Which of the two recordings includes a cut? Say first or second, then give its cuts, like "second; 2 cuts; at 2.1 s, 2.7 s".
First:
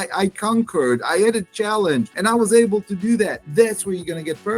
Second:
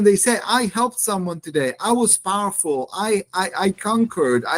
first; 2 cuts; at 2.1 s, 3.4 s